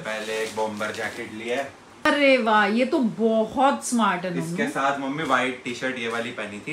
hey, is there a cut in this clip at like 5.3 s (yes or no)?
no